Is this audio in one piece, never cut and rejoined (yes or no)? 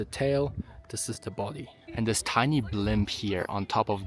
no